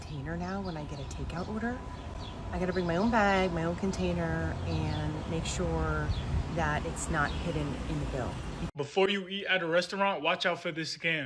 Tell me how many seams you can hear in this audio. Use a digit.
1